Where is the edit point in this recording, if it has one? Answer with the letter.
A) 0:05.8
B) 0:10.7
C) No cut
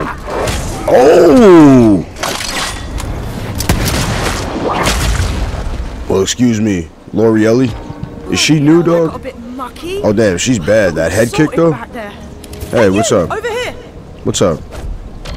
C